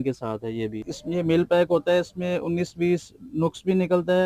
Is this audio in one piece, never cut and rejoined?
no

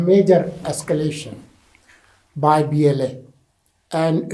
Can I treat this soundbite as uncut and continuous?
yes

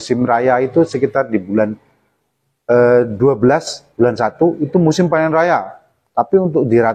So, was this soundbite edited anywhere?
no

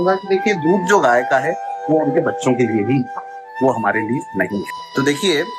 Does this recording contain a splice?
yes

